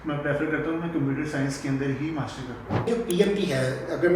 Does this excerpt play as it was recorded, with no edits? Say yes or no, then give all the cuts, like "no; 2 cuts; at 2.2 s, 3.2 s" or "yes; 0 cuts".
no; 1 cut; at 2.9 s